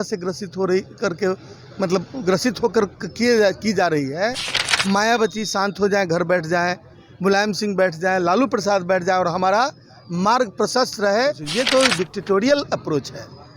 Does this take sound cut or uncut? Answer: cut